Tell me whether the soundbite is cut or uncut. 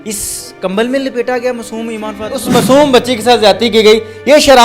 cut